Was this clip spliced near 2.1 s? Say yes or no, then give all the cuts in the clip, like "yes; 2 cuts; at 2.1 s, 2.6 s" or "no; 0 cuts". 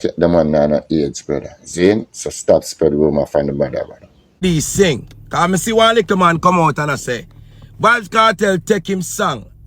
no; 1 cut; at 4.4 s